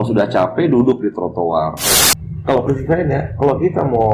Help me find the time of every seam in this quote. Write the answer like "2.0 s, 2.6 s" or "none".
2.1 s